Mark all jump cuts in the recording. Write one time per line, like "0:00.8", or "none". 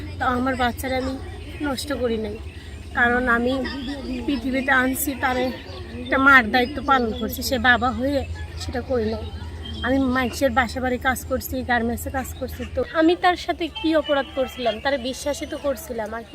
0:12.9